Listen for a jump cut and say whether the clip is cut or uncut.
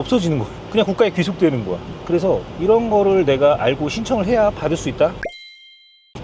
cut